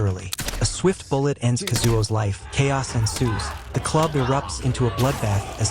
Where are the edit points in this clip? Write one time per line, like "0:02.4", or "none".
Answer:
0:02.4